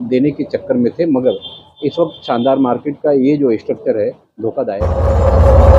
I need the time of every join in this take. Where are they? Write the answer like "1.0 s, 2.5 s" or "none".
4.8 s